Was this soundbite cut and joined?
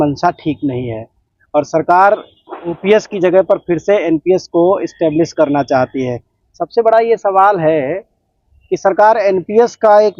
no; 0 cuts

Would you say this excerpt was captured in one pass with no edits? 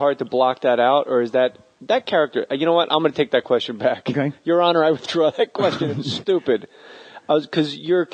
yes; 0 cuts

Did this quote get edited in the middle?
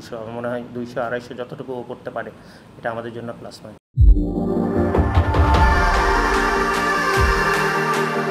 no; 0 cuts

